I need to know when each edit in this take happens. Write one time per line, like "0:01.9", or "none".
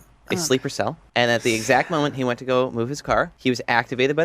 0:01.0
0:03.3